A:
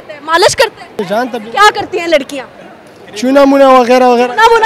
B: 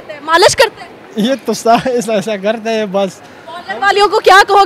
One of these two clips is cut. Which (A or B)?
A